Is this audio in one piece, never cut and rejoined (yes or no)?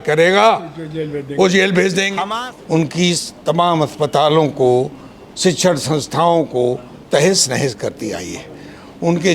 no